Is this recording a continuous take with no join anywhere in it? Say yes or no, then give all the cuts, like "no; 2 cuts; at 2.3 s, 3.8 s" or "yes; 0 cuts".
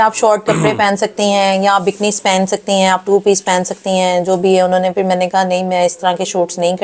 yes; 0 cuts